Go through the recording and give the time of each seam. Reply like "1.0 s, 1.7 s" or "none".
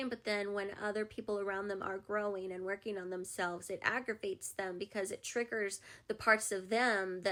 none